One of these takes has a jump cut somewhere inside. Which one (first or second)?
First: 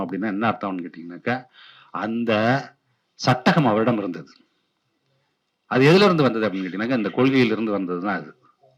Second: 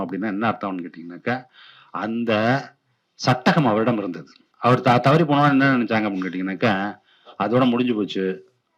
second